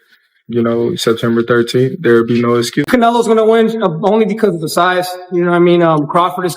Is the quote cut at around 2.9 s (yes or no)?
yes